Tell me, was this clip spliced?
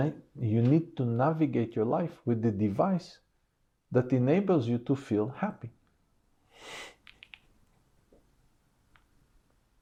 no; 0 cuts

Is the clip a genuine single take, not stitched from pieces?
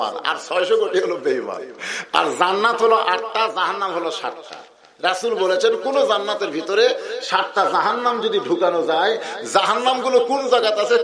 yes; 0 cuts

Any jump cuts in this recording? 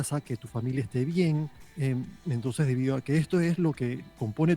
yes; 1 cut; at 1.6 s

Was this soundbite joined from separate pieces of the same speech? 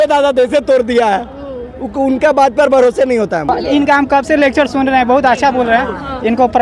yes; 1 cut; at 3.5 s

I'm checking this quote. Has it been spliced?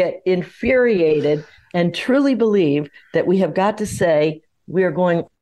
no; 0 cuts

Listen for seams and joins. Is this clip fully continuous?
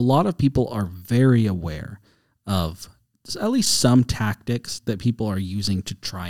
yes; 0 cuts

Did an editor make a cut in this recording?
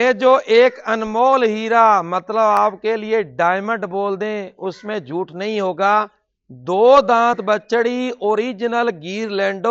no; 0 cuts

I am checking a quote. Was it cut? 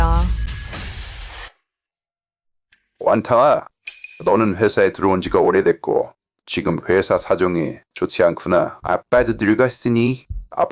no; 0 cuts

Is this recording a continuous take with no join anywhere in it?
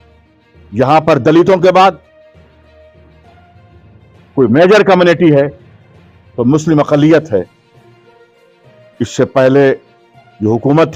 yes; 0 cuts

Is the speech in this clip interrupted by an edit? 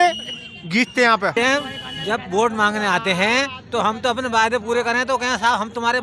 yes; 1 cut; at 1.3 s

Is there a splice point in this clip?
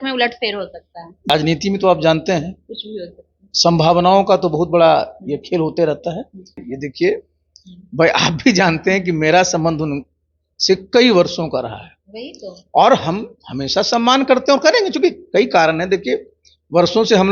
yes; 2 cuts; at 1.3 s, 6.6 s

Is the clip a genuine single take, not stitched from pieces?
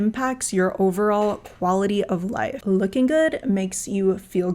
no; 1 cut; at 2.6 s

